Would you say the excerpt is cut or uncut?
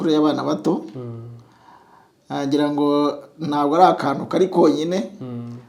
uncut